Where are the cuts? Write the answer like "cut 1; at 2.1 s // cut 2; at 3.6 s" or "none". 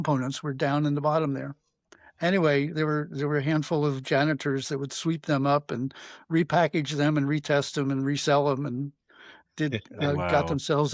none